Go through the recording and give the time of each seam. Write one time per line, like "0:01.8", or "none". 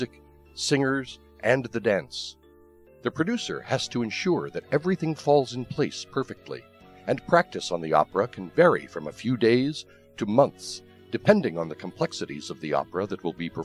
0:06.7